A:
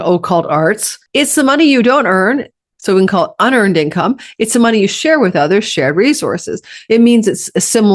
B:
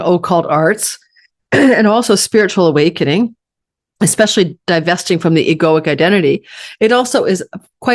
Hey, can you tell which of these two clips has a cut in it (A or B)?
A